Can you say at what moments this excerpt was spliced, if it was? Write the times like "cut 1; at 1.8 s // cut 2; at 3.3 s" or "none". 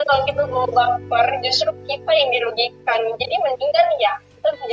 none